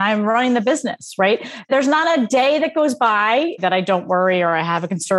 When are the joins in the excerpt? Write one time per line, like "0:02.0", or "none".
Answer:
0:03.6